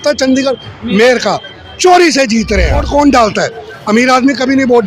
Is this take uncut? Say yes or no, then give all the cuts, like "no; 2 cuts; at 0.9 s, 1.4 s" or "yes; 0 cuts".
no; 1 cut; at 2.9 s